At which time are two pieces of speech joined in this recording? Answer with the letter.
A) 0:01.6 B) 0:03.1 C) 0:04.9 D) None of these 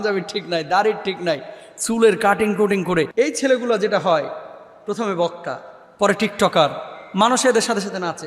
B